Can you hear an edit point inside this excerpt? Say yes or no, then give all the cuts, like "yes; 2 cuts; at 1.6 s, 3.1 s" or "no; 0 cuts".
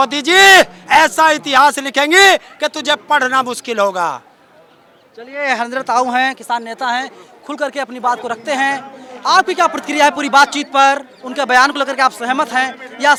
no; 0 cuts